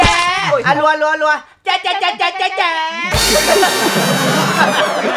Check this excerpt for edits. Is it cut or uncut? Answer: uncut